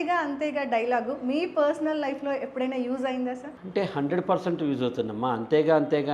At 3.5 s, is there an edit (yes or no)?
yes